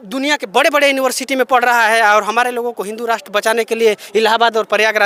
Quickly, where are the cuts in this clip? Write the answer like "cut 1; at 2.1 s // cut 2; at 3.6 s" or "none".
none